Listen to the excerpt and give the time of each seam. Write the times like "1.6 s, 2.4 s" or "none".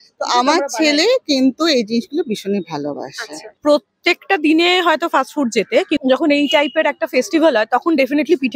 3.5 s, 6.0 s